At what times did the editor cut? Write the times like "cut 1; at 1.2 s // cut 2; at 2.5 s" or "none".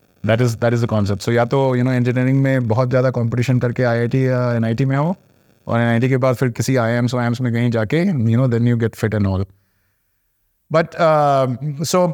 none